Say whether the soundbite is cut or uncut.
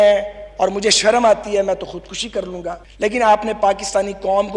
uncut